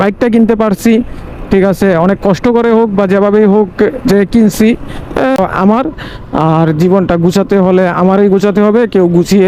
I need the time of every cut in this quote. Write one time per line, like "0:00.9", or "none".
0:05.4